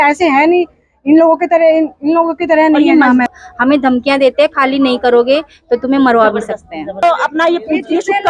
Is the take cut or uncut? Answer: cut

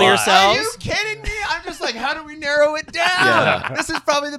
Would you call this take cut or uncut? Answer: uncut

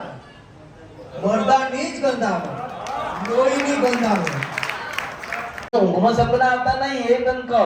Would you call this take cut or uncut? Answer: cut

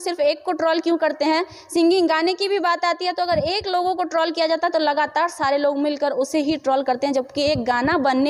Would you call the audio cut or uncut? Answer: uncut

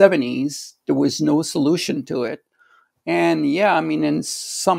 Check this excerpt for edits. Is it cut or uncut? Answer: uncut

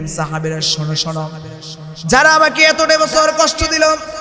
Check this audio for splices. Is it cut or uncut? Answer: uncut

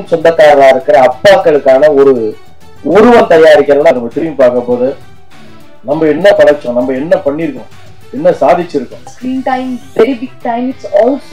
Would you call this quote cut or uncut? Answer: cut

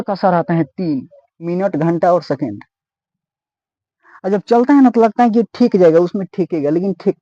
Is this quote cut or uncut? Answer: uncut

